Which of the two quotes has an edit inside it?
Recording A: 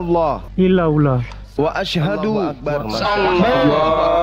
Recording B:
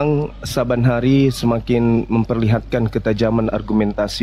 A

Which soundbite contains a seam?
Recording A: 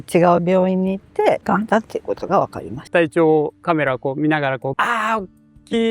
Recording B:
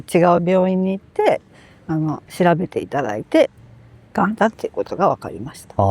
A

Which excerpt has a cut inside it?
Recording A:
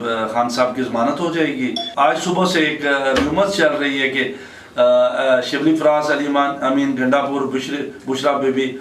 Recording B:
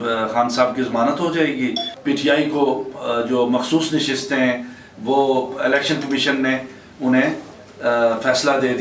B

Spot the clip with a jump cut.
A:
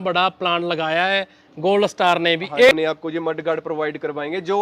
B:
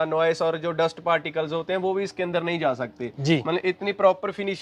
A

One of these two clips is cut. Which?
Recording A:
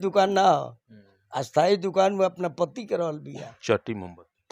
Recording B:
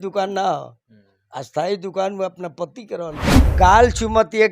B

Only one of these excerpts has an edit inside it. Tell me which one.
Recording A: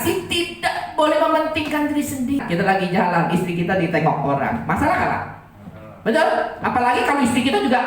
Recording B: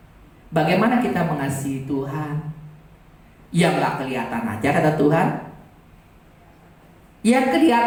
A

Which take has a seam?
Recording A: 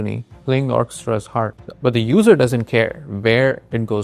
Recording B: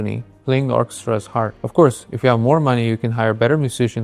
A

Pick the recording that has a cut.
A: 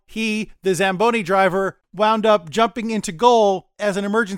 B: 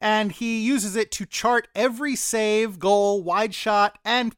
A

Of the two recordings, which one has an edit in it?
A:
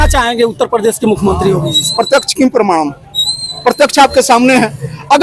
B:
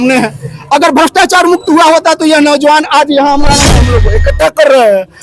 B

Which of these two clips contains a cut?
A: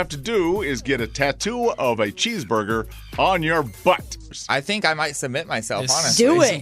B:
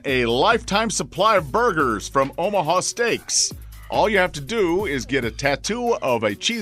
A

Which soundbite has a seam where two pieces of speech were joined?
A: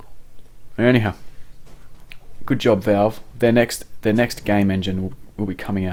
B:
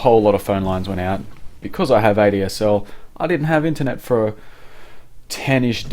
B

